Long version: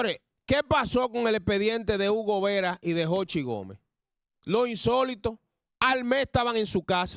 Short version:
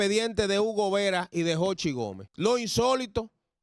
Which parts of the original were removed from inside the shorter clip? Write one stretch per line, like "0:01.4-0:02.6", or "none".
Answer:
0:03.7-0:04.3